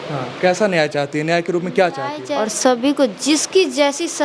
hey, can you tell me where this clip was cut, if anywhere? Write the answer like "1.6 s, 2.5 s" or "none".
2.4 s